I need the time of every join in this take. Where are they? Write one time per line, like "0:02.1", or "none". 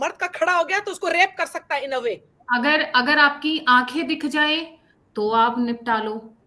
0:02.3